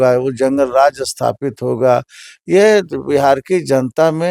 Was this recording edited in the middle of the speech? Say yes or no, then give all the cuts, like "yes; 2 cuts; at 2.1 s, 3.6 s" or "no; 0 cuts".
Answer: no; 0 cuts